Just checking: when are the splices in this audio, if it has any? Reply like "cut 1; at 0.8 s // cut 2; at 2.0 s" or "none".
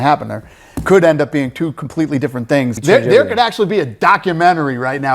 cut 1; at 2.8 s